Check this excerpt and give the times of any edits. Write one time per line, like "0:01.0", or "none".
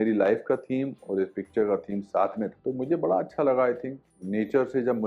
none